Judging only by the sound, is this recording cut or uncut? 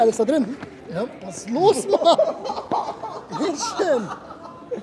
uncut